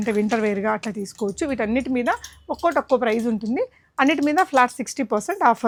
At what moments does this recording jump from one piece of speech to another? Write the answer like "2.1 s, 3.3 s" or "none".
none